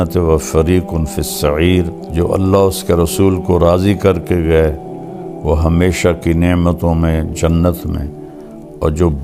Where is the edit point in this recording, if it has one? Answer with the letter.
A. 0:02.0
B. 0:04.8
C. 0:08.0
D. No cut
A